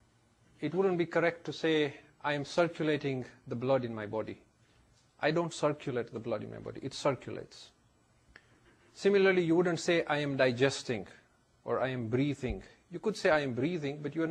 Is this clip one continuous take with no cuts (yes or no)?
yes